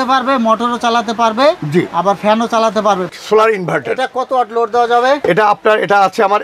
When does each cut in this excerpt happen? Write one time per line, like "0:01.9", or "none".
0:03.1